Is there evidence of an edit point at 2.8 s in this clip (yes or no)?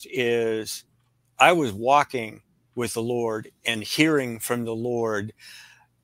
no